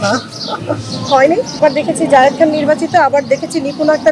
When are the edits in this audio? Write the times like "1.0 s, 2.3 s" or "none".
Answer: 1.6 s